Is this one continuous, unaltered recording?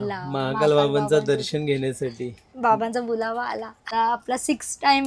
no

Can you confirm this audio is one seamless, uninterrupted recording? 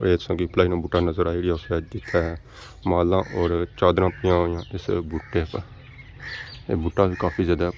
yes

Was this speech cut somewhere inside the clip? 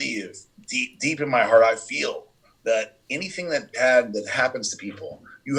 no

